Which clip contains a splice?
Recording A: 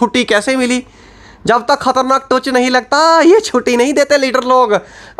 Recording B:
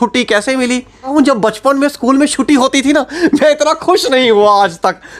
B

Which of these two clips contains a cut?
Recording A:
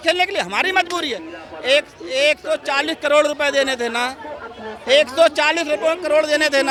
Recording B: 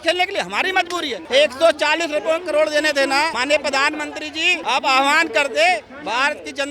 B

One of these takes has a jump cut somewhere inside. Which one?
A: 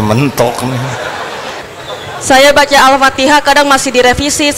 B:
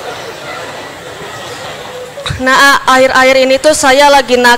A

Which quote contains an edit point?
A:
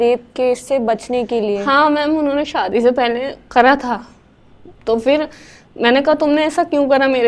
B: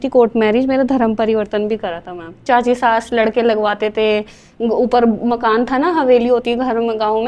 B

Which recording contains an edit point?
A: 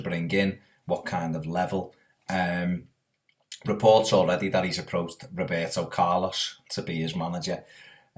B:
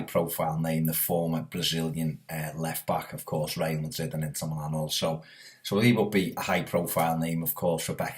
B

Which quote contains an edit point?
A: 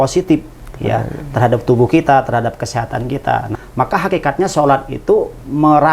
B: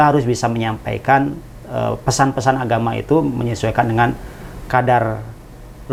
A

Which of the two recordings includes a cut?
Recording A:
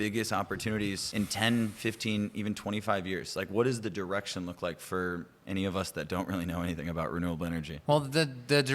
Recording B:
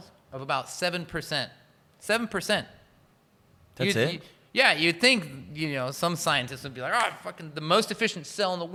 A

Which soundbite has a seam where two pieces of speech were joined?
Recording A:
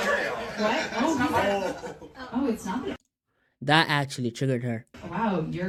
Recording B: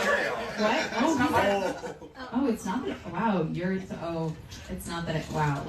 B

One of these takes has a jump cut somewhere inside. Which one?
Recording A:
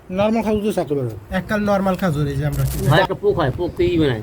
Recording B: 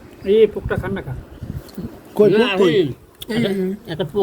A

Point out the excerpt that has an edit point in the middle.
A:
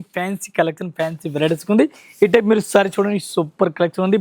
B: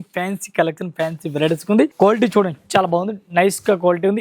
B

